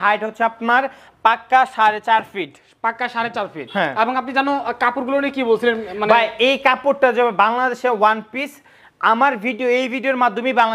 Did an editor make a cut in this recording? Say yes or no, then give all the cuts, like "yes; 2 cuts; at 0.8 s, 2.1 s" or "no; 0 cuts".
no; 0 cuts